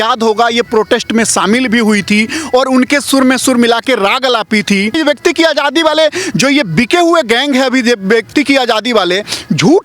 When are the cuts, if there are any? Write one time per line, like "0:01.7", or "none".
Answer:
0:05.0